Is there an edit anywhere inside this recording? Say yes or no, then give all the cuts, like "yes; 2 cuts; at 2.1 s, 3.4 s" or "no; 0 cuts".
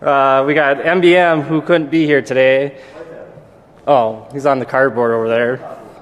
yes; 1 cut; at 3.1 s